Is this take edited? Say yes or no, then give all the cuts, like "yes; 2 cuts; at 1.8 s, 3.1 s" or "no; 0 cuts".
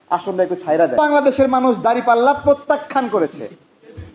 yes; 1 cut; at 1.0 s